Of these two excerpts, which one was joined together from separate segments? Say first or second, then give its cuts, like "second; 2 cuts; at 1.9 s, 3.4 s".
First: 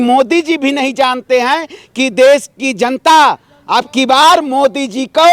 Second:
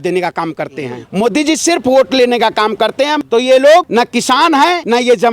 second; 3 cuts; at 1.0 s, 3.2 s, 4.5 s